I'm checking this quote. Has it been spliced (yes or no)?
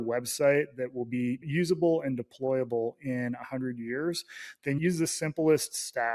no